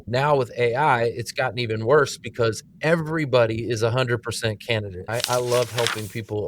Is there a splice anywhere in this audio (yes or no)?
yes